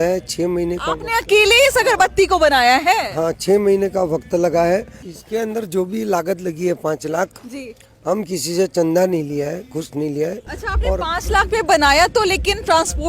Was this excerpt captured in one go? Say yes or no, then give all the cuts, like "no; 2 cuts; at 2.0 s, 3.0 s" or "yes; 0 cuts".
yes; 0 cuts